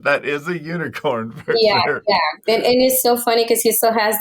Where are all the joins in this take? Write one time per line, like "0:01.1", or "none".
none